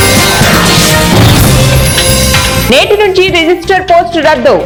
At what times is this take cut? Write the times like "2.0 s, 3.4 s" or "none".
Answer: none